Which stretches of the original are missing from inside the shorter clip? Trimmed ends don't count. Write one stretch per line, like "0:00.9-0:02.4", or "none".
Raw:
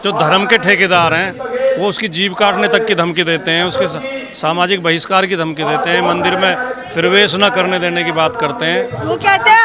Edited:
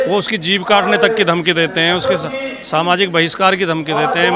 none